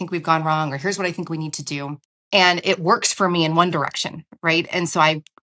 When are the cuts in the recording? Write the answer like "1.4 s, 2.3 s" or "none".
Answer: 2.1 s